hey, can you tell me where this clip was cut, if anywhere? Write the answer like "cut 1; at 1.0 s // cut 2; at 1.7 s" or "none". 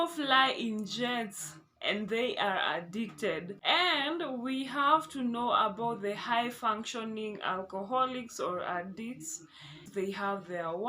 cut 1; at 3.5 s // cut 2; at 9.8 s